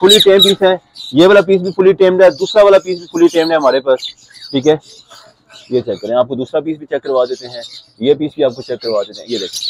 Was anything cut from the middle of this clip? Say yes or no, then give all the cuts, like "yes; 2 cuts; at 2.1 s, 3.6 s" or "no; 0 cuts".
no; 0 cuts